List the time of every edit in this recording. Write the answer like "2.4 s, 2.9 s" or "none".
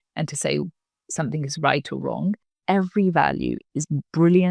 2.5 s